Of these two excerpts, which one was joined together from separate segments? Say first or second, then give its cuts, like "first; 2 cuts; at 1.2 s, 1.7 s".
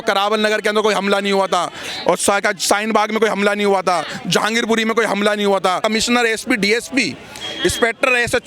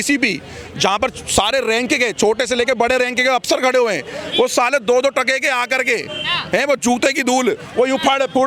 first; 1 cut; at 5.8 s